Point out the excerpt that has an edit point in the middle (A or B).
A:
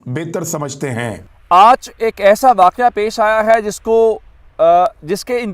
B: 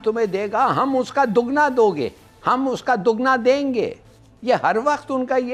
A